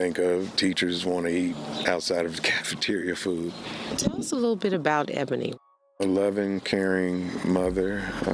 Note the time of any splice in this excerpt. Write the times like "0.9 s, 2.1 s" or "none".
4.1 s